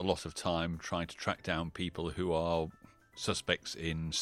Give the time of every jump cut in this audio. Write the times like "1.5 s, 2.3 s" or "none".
none